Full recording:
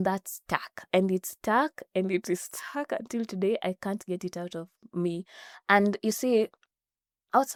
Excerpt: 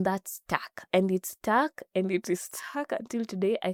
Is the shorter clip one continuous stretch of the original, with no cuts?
yes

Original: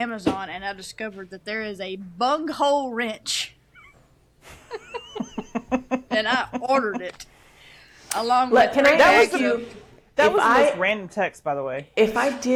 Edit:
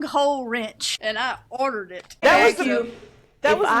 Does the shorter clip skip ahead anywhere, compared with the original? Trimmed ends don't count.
yes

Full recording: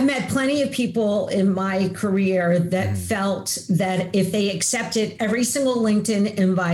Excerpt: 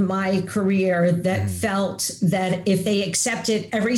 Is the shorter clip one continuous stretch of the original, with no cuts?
yes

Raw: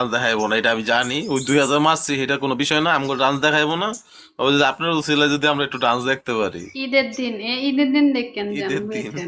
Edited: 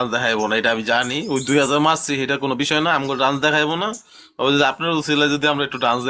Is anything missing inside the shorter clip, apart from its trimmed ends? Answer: no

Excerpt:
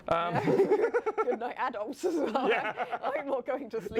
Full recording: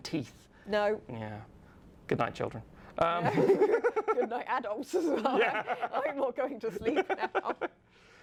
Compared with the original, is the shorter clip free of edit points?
yes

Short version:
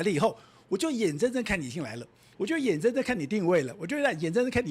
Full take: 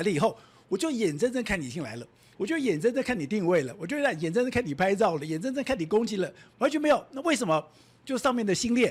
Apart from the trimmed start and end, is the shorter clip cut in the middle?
no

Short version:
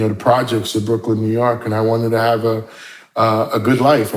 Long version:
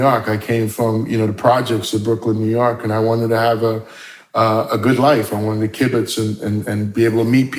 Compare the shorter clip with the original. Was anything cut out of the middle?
no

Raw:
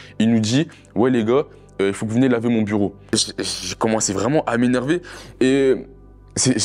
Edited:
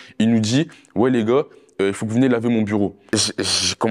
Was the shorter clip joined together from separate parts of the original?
no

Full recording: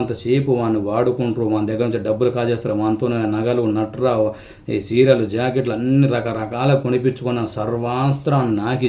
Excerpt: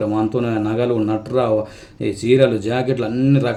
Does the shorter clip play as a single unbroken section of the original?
yes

